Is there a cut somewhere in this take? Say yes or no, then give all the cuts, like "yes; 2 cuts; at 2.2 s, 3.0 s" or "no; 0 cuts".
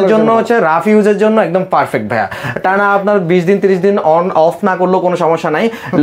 no; 0 cuts